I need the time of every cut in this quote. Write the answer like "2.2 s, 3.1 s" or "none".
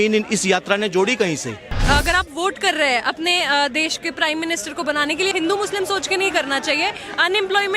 1.8 s, 5.3 s

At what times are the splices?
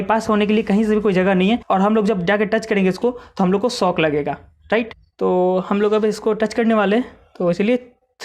1.6 s, 5.0 s

